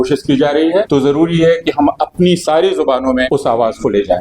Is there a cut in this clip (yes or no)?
yes